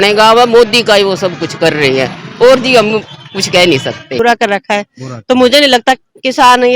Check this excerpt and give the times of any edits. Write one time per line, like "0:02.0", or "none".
0:04.1